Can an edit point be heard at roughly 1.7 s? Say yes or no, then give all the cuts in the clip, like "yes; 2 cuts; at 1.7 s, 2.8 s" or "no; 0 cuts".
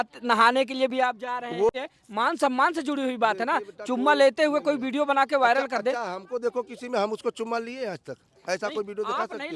yes; 1 cut; at 1.7 s